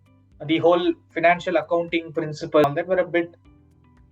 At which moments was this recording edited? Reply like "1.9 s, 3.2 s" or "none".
2.6 s